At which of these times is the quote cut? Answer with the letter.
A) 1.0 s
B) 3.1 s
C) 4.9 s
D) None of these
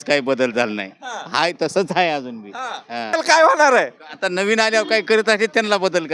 B